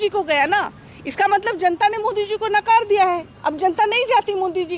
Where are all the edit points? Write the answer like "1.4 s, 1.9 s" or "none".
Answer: none